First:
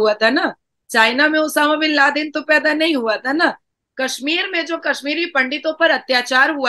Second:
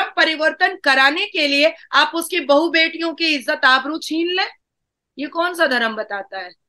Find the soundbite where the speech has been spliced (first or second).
first